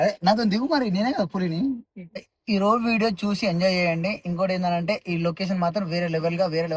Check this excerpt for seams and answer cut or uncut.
cut